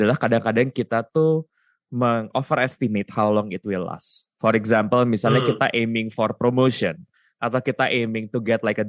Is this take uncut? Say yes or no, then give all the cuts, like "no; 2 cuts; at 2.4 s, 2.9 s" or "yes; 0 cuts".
yes; 0 cuts